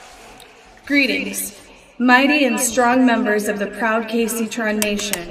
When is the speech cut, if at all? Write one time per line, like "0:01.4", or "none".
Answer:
none